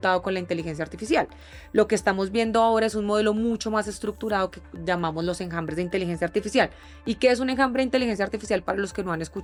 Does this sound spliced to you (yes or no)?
no